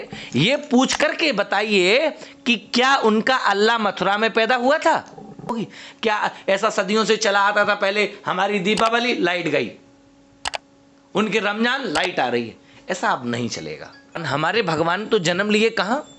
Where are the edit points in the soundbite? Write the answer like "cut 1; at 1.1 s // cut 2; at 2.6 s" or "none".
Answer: cut 1; at 5.5 s // cut 2; at 14.2 s